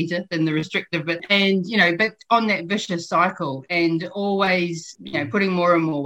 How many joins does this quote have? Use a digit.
2